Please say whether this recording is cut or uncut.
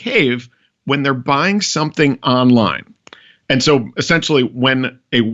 uncut